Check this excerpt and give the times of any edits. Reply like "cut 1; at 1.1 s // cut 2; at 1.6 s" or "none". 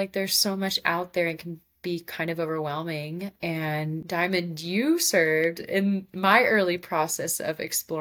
cut 1; at 4.0 s

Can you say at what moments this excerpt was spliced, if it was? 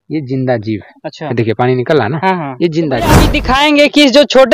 cut 1; at 3.4 s

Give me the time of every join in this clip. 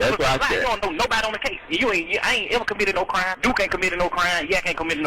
cut 1; at 3.3 s

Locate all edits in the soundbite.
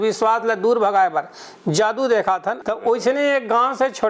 cut 1; at 2.6 s

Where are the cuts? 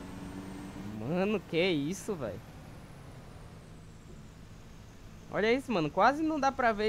none

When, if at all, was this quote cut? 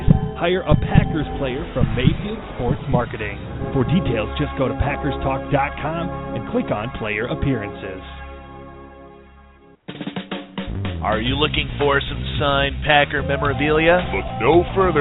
cut 1; at 9.7 s

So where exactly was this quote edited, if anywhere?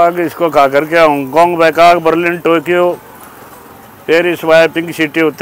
none

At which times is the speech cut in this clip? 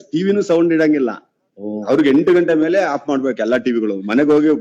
none

